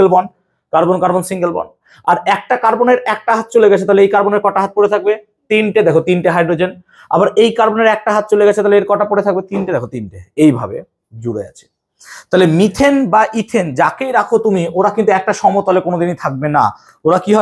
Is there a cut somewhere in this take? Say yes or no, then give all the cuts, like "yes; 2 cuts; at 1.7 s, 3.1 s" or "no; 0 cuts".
no; 0 cuts